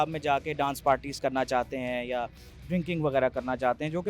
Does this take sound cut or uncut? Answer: uncut